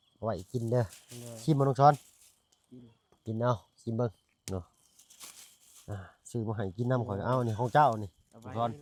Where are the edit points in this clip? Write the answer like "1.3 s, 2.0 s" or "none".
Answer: none